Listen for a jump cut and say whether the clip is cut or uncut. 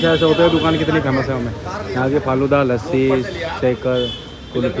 uncut